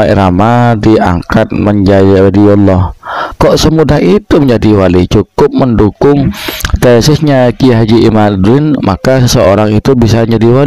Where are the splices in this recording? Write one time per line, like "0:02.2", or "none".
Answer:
none